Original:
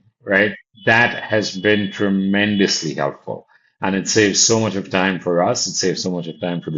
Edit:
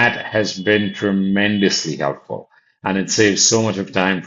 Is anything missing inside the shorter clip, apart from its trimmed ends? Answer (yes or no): no